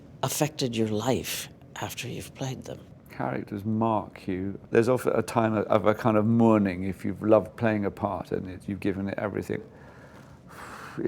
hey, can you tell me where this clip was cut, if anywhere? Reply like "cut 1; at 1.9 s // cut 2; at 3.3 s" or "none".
cut 1; at 3.0 s